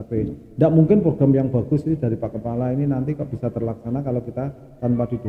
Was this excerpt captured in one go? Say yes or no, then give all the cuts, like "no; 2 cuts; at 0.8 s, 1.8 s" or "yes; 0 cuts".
yes; 0 cuts